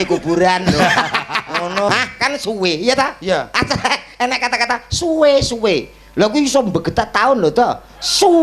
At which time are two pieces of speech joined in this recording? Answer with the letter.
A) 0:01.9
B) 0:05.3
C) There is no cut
A